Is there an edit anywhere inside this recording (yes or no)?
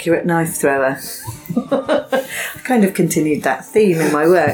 no